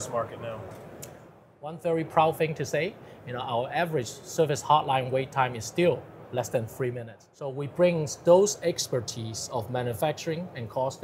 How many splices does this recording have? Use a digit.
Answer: 2